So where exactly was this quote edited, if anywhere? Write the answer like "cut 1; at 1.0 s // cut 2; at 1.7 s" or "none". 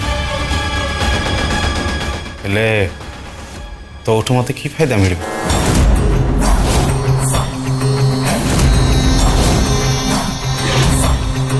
none